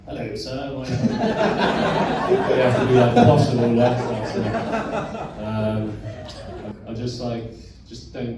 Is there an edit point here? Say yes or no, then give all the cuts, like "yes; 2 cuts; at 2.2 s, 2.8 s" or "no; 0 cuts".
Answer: no; 0 cuts